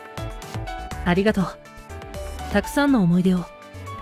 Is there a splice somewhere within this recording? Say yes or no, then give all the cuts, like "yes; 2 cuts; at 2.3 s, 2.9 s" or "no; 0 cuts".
no; 0 cuts